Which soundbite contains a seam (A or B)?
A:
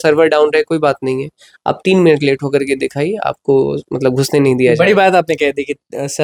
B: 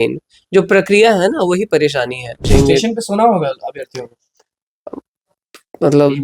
B